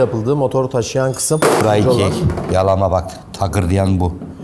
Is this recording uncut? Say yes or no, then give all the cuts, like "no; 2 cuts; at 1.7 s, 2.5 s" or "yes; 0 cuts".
no; 1 cut; at 1.6 s